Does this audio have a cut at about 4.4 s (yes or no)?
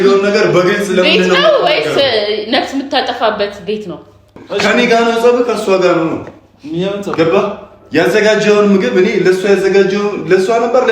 yes